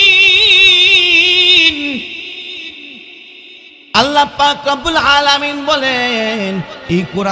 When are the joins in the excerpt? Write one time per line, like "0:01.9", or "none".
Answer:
none